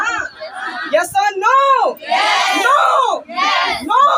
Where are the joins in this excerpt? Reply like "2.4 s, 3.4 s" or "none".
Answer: none